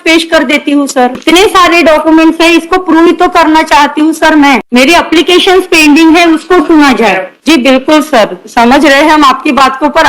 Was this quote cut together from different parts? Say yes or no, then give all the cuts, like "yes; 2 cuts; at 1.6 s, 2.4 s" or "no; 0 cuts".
yes; 3 cuts; at 1.2 s, 4.6 s, 7.3 s